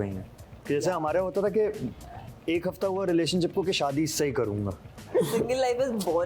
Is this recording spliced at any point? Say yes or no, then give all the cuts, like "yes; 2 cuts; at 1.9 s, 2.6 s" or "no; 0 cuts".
yes; 1 cut; at 5.0 s